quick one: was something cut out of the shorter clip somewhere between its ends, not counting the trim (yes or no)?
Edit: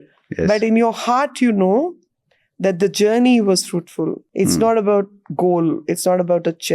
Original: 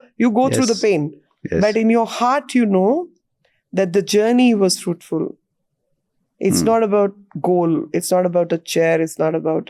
yes